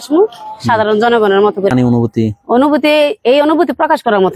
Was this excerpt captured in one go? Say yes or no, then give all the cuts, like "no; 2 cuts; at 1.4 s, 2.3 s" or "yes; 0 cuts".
no; 1 cut; at 1.7 s